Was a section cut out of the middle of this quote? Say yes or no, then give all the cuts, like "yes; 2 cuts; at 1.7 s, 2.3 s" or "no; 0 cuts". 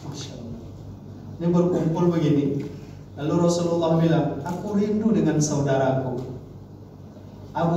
no; 0 cuts